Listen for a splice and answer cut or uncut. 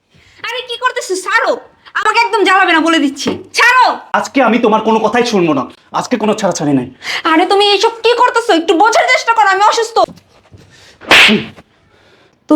cut